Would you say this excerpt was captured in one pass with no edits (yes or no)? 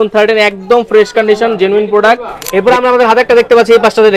no